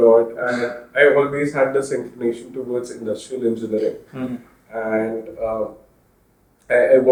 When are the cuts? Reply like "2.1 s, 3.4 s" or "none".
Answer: none